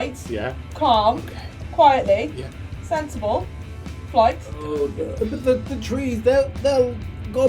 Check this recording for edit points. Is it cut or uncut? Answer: cut